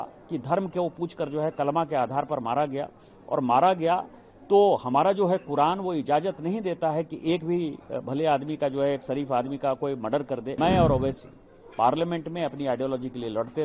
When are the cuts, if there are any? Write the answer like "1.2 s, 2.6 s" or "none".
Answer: 10.5 s